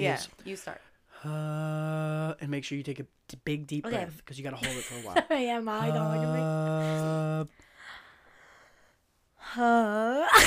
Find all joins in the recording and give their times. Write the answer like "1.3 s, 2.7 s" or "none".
none